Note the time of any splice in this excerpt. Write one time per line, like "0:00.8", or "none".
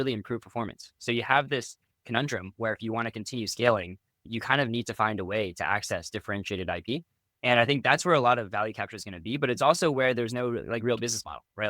0:04.2